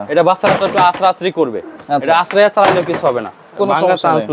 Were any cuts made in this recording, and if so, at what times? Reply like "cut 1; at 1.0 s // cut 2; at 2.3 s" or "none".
none